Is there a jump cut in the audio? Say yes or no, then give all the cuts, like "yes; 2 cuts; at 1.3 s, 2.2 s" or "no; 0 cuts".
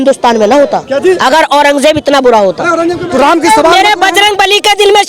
yes; 1 cut; at 3.0 s